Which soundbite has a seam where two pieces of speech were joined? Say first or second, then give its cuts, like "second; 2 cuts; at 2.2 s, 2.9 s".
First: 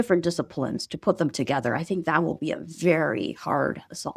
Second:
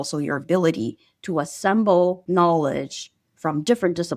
second; 1 cut; at 2.2 s